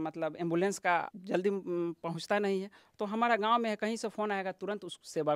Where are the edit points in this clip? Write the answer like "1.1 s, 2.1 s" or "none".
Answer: 1.2 s